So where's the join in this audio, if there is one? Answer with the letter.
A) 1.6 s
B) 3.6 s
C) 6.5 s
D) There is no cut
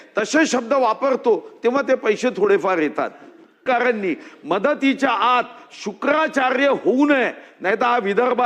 B